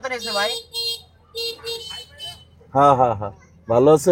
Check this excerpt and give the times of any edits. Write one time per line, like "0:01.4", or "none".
none